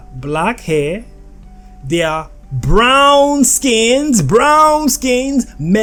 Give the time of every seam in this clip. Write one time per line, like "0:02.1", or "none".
none